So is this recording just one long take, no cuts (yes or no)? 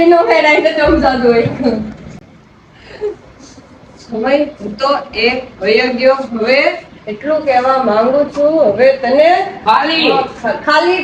yes